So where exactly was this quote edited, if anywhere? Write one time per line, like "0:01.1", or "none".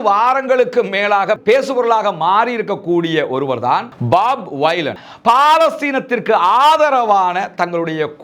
0:05.0